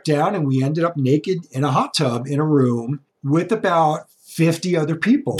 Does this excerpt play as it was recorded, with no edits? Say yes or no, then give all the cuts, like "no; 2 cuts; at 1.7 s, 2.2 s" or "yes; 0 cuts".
yes; 0 cuts